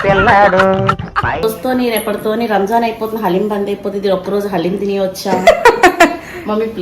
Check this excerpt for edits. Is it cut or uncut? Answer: cut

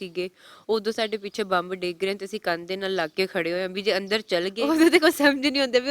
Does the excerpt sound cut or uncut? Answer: cut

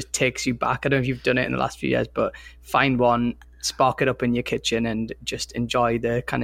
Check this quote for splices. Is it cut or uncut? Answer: uncut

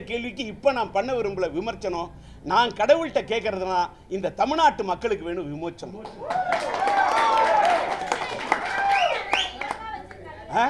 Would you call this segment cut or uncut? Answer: uncut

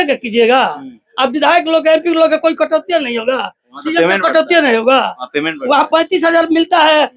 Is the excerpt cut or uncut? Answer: uncut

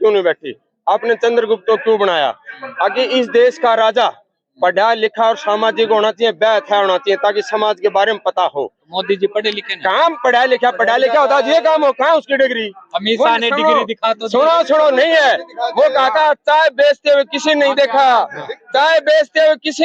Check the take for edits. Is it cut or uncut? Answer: uncut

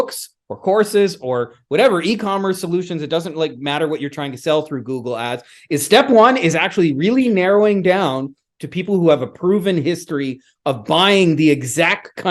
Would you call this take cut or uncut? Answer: uncut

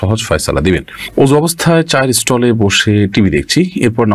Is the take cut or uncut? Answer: cut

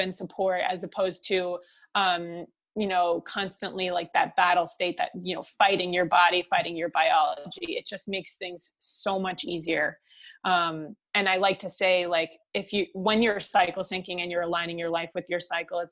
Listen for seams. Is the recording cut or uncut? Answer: uncut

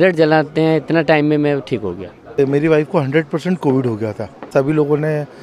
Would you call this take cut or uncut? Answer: cut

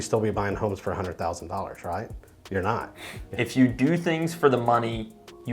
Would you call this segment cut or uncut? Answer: cut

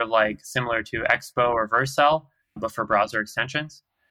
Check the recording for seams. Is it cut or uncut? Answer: cut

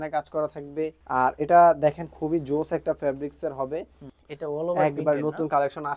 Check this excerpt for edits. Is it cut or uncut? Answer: cut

